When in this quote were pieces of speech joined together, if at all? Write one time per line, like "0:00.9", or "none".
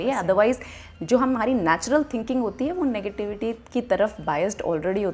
none